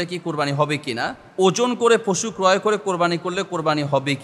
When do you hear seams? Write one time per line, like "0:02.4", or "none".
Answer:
0:01.2